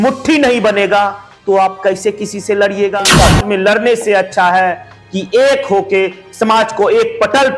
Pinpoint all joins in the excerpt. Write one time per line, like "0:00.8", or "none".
0:03.4

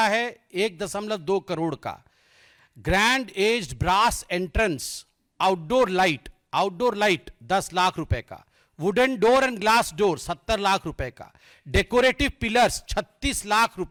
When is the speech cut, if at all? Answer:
none

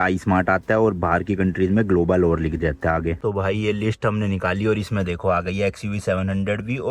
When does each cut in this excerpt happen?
none

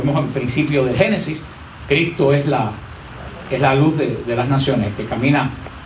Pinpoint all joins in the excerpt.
0:04.4

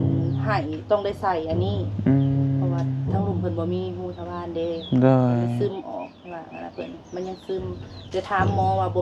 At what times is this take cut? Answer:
none

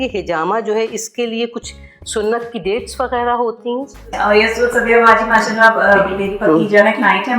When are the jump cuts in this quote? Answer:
0:04.0

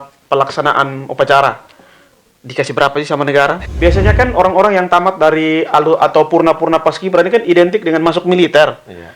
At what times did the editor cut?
0:03.6

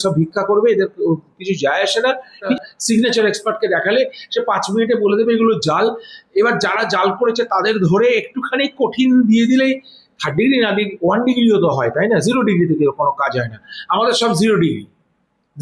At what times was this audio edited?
0:02.5

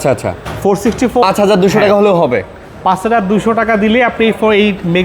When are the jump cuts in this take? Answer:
0:01.2

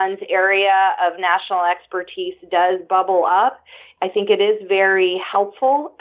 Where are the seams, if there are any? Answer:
none

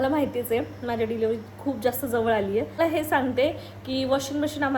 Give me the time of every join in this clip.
0:02.8

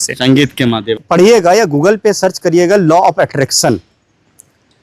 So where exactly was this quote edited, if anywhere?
0:01.0

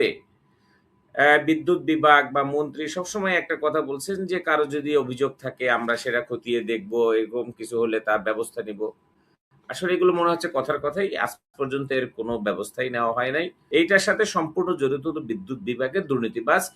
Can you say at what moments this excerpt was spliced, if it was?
0:13.6

